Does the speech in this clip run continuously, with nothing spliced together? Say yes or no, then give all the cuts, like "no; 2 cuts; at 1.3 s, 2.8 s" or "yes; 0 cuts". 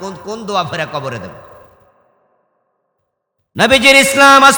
yes; 0 cuts